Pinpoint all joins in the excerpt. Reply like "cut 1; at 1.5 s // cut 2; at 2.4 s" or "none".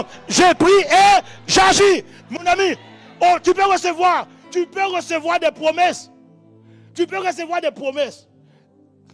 none